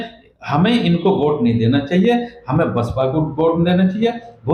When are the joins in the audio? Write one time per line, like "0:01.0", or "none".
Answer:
none